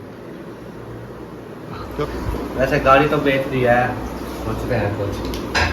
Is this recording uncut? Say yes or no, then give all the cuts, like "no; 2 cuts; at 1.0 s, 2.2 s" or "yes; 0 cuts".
no; 1 cut; at 1.8 s